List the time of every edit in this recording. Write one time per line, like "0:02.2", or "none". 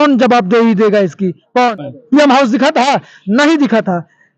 0:01.8